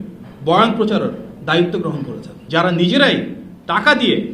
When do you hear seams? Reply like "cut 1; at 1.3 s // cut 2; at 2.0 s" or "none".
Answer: cut 1; at 2.4 s